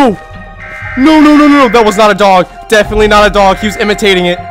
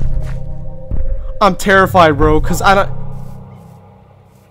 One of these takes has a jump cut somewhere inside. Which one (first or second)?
second